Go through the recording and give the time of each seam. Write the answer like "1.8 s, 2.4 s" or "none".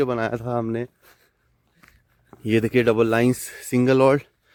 none